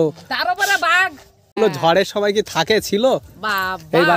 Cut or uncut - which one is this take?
cut